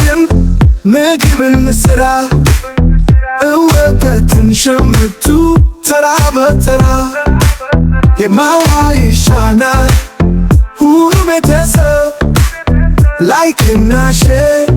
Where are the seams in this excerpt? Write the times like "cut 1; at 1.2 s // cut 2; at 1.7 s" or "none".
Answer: none